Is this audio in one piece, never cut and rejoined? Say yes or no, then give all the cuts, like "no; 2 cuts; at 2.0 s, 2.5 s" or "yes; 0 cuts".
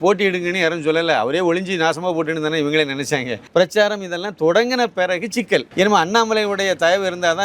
no; 2 cuts; at 3.4 s, 5.7 s